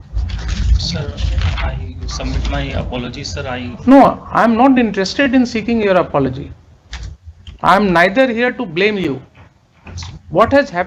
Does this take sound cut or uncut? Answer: uncut